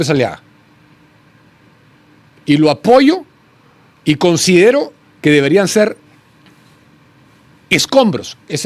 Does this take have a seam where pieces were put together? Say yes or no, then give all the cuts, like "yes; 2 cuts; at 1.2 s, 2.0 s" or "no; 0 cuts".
no; 0 cuts